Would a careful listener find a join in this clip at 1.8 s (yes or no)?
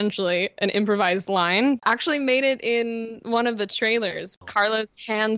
yes